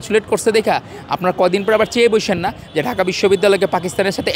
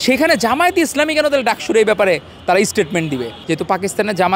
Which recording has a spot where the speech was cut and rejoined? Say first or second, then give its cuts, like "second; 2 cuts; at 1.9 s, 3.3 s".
second; 1 cut; at 3.4 s